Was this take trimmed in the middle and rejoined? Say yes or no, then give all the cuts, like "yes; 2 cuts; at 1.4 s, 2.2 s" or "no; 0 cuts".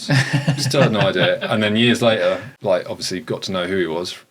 yes; 1 cut; at 2.5 s